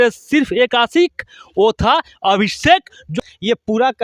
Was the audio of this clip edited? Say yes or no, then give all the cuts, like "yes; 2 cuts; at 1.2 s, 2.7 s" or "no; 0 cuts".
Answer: yes; 1 cut; at 3.0 s